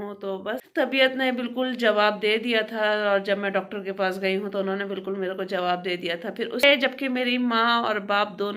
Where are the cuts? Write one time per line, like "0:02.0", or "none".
0:00.9
0:06.6